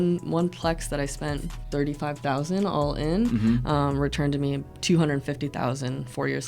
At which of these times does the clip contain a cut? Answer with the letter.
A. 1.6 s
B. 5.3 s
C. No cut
A